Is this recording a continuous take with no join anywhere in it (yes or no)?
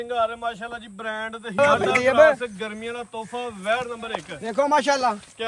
no